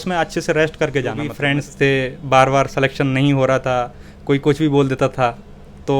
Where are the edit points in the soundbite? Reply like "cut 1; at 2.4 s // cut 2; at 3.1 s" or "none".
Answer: cut 1; at 1.3 s